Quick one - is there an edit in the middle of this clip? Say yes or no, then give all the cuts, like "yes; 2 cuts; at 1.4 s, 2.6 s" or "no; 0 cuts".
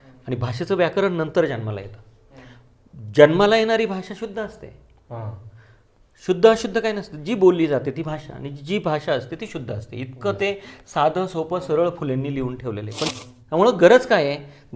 yes; 1 cut; at 13.1 s